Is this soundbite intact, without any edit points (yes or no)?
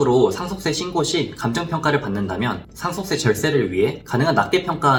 yes